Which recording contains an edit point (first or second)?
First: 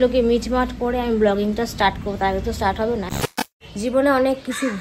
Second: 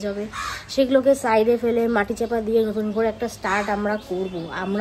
first